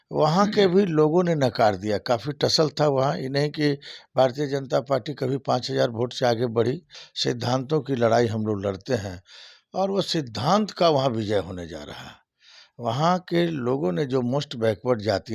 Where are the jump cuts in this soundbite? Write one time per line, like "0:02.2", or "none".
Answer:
0:07.1